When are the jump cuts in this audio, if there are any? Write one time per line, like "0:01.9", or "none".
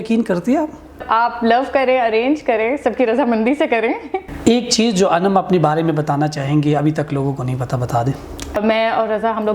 0:01.0
0:04.2
0:08.6